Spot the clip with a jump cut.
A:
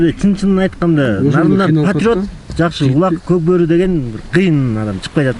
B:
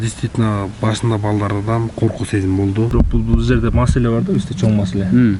B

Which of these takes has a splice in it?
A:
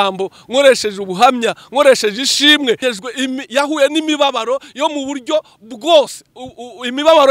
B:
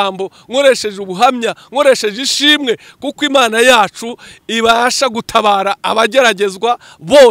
A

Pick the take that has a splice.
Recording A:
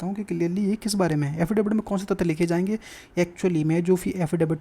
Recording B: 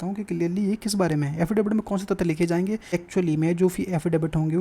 B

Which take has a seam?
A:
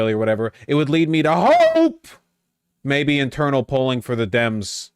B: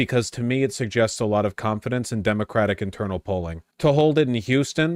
B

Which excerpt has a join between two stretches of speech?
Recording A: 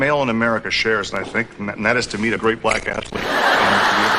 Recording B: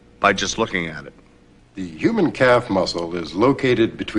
A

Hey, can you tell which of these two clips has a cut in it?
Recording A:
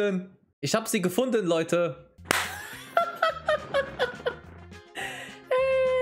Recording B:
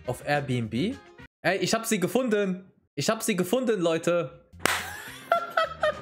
B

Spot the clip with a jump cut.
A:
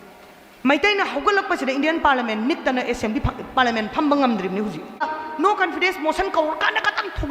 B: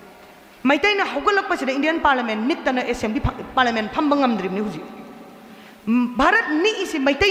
A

